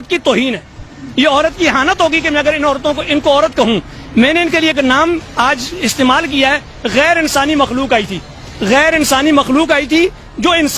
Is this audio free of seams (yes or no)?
yes